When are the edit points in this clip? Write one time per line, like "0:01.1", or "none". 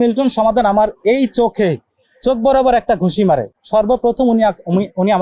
none